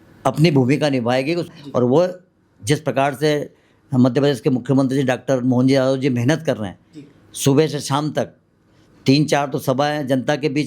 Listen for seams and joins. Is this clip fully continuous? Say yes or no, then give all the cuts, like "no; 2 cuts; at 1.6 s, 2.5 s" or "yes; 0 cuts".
no; 1 cut; at 1.5 s